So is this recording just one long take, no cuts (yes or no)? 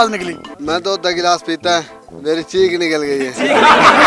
yes